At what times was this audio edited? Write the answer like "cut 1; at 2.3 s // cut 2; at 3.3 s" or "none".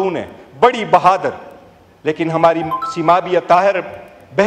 none